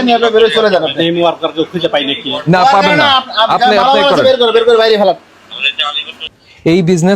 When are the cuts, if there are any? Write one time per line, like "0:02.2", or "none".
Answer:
none